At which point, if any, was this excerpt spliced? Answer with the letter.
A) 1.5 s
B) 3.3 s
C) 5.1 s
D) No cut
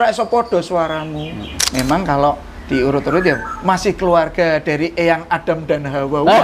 A